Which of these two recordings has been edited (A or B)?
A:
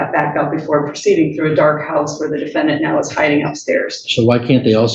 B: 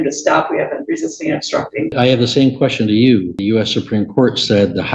B